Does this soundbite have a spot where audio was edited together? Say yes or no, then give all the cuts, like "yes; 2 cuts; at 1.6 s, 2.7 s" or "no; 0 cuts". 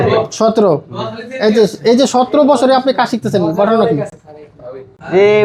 no; 0 cuts